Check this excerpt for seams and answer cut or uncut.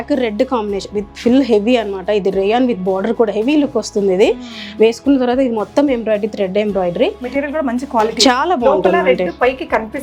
uncut